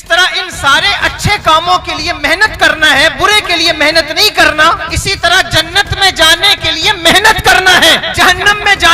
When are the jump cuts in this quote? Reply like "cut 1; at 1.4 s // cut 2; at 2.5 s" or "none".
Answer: cut 1; at 4.9 s // cut 2; at 8.1 s